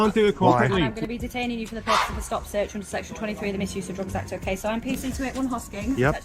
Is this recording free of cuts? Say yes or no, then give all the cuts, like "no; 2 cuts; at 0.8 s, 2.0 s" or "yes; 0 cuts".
no; 1 cut; at 0.9 s